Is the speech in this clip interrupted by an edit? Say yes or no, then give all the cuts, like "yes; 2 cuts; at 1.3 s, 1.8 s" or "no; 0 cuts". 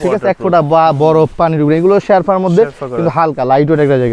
no; 0 cuts